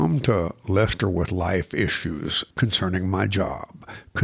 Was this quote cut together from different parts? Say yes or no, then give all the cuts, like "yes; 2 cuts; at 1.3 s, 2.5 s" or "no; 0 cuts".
yes; 1 cut; at 2.4 s